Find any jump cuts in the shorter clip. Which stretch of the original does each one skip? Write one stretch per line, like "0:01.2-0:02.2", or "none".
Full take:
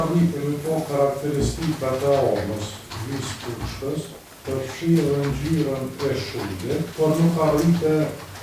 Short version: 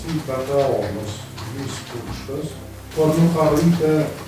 0:04.4-0:06.9